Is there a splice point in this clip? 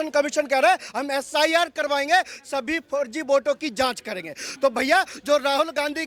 no; 0 cuts

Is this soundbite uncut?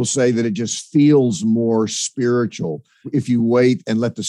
no; 1 cut; at 3.0 s

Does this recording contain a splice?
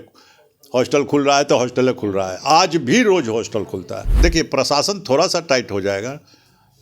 yes; 1 cut; at 4.2 s

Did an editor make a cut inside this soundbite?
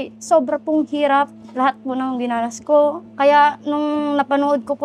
yes; 1 cut; at 3.0 s

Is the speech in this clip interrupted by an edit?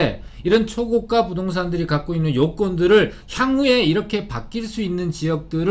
no; 0 cuts

